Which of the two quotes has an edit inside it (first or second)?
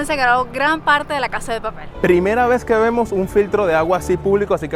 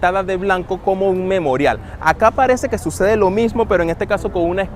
first